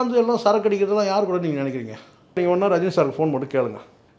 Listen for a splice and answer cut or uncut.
cut